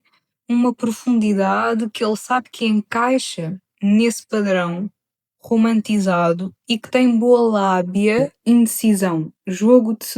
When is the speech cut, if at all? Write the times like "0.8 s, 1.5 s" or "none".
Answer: 8.3 s